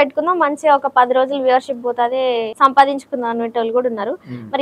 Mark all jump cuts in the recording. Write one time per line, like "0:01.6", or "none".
0:02.5